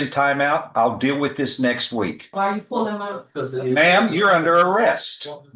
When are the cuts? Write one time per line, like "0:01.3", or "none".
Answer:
0:02.3